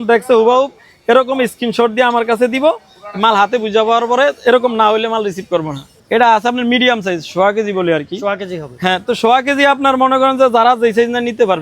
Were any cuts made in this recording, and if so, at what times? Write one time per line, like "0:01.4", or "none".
0:05.9

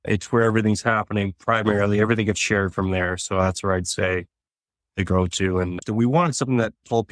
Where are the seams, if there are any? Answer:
0:05.8

